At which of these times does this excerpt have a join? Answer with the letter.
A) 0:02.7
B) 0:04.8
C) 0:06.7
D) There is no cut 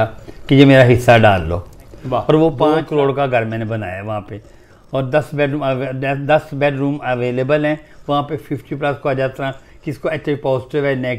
A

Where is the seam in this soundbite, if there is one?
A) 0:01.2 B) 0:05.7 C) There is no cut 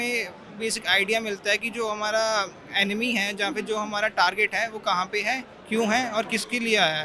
C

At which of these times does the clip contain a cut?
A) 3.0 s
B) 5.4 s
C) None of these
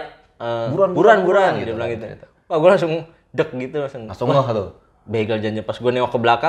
C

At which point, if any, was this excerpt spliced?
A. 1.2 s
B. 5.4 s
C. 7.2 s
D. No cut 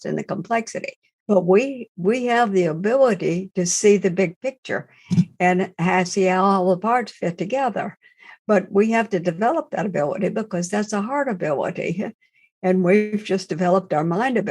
A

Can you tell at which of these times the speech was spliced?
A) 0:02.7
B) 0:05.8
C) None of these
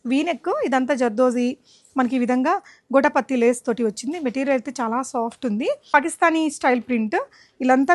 B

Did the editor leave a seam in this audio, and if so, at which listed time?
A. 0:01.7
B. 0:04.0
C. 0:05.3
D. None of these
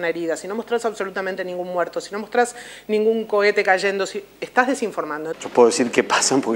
C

